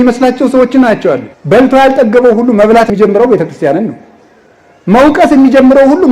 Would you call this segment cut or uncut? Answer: cut